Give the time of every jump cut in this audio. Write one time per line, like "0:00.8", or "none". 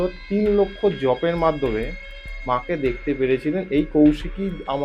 none

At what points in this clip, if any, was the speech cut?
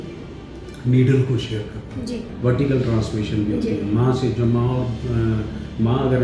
0:02.3

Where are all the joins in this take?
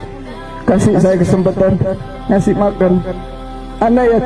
none

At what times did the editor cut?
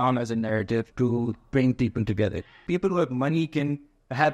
0:00.9
0:02.5

